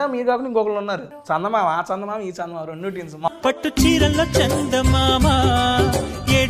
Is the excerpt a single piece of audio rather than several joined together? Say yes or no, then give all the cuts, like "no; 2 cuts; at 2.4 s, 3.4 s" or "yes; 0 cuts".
no; 2 cuts; at 1.1 s, 3.3 s